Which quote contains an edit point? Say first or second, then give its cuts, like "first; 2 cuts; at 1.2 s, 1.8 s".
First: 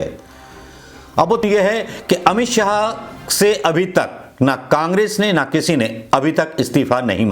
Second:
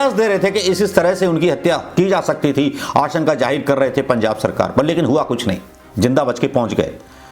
first; 1 cut; at 1.4 s